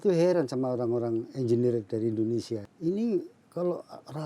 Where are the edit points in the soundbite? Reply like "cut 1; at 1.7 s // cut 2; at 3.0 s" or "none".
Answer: cut 1; at 2.7 s